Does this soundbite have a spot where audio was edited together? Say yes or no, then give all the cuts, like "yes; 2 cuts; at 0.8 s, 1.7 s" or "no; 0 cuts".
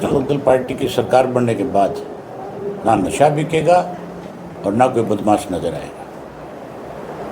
no; 0 cuts